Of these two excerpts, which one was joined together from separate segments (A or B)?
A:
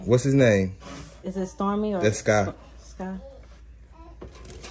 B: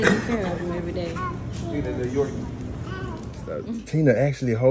B